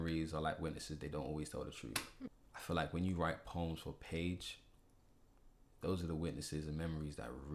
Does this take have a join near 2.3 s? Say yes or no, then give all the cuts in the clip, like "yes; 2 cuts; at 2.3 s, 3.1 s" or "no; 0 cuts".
yes; 1 cut; at 2.3 s